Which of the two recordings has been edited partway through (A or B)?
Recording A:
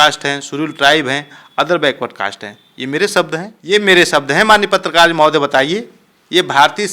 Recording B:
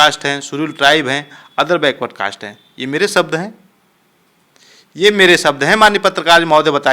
A